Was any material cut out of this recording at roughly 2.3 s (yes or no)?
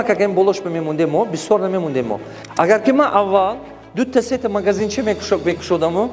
yes